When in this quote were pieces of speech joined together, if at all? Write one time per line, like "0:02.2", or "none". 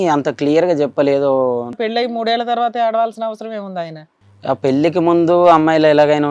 0:01.8
0:04.1